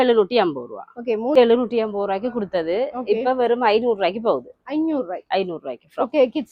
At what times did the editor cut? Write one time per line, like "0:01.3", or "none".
0:01.4